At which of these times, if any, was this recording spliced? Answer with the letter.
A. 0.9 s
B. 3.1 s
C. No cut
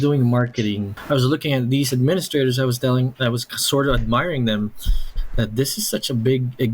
A